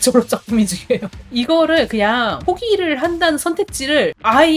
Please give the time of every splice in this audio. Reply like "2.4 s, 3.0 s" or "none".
1.2 s, 2.4 s